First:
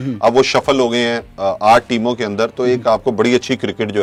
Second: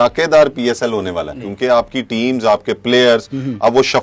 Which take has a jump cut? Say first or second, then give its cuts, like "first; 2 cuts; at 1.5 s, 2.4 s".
second; 1 cut; at 1.4 s